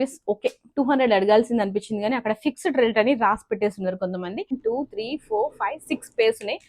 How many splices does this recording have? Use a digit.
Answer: 1